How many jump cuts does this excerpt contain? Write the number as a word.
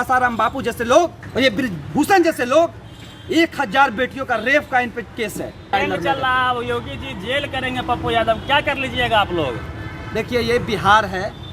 two